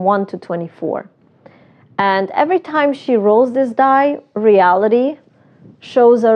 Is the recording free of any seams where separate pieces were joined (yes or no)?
yes